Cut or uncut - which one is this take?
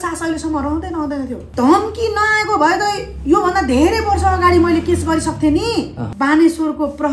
cut